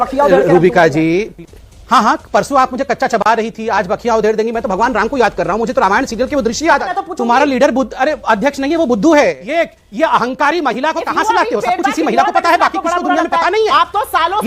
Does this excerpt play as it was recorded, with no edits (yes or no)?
no